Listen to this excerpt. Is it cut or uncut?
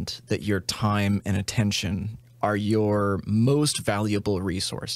uncut